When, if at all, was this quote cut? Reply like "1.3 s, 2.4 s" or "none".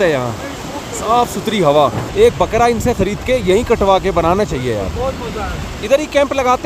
2.0 s, 5.7 s